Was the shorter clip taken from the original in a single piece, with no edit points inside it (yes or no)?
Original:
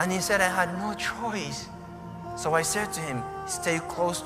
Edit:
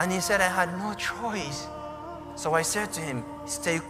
yes